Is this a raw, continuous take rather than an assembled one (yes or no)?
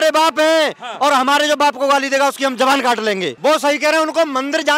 no